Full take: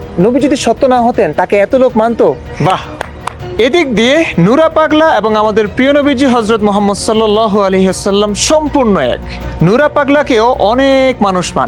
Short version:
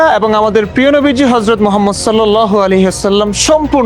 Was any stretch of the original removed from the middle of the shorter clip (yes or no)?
no